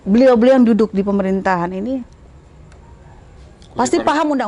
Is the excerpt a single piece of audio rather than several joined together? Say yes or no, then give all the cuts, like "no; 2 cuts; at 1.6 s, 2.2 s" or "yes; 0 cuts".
yes; 0 cuts